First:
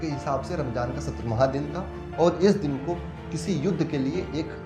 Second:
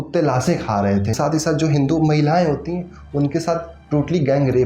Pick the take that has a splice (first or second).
second